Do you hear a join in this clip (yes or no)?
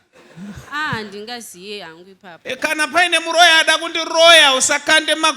yes